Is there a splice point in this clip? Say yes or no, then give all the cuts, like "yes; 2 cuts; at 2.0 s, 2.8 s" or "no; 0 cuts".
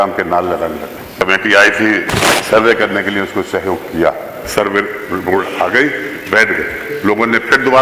yes; 2 cuts; at 1.1 s, 4.4 s